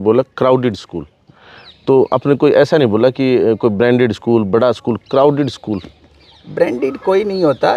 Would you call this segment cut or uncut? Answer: uncut